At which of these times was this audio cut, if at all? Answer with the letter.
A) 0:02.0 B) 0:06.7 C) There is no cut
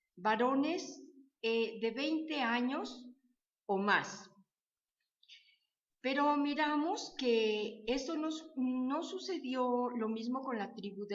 C